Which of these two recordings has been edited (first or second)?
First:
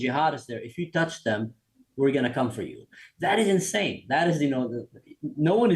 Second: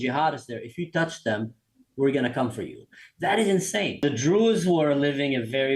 second